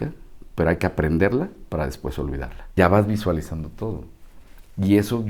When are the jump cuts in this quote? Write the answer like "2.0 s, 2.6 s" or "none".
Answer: 2.8 s